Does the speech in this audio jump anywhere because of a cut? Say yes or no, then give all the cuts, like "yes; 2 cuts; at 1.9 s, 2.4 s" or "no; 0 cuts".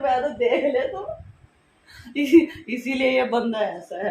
no; 0 cuts